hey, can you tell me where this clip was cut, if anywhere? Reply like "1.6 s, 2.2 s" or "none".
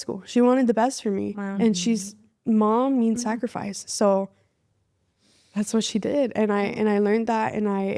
none